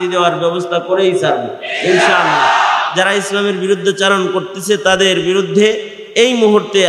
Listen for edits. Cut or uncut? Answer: uncut